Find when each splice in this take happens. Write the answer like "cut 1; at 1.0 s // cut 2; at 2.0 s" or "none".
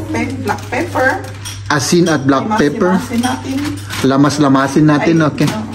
none